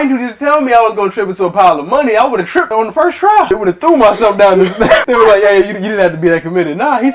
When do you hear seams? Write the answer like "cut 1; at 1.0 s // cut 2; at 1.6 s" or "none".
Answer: cut 1; at 2.7 s // cut 2; at 3.5 s // cut 3; at 5.0 s